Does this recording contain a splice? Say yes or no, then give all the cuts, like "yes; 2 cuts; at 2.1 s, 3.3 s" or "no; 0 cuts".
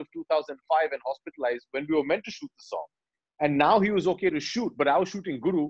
no; 0 cuts